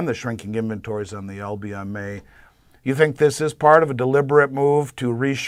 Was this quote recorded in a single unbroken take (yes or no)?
yes